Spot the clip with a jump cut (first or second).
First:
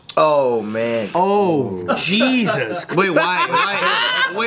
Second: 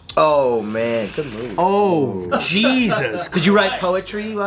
first